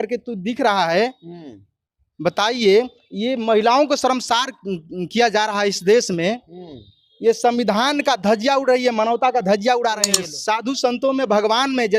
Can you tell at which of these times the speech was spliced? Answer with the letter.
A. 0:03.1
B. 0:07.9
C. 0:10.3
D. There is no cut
C